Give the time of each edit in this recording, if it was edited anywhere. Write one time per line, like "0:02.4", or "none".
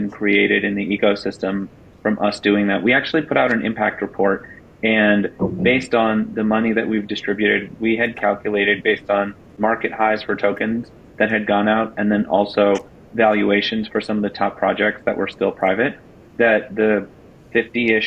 0:09.5